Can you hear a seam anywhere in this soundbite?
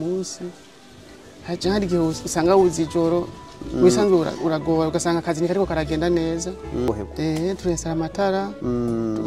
yes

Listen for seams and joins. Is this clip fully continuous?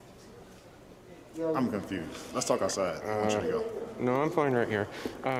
yes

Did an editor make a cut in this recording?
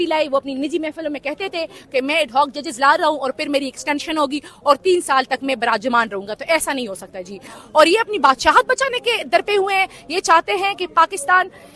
yes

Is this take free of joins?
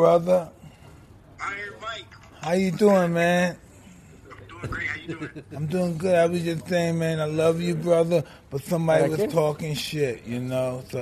yes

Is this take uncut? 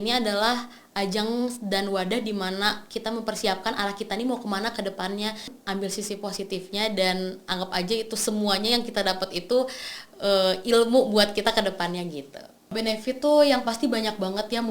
no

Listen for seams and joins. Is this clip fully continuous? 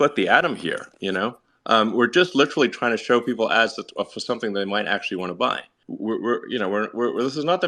yes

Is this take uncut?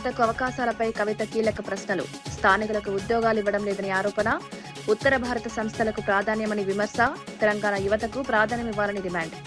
yes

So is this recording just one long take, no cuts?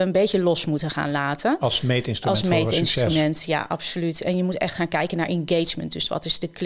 yes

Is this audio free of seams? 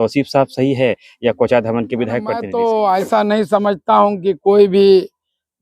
no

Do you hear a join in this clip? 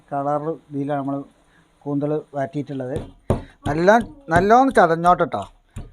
yes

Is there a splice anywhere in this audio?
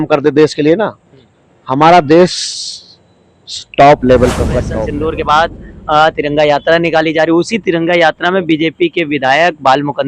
yes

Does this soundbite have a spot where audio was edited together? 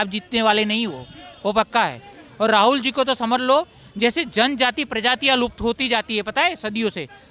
no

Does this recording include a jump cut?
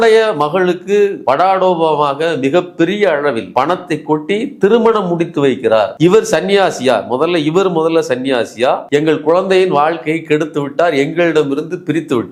no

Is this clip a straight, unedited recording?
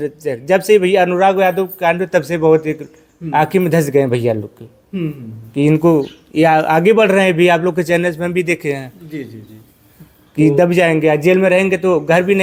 yes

